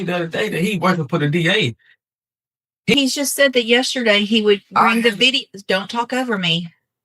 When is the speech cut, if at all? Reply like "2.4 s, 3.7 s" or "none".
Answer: 2.9 s